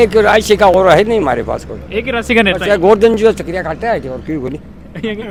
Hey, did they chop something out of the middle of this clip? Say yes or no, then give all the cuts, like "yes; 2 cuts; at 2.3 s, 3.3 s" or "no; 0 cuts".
no; 0 cuts